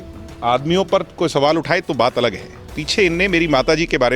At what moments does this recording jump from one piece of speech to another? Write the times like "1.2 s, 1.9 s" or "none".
none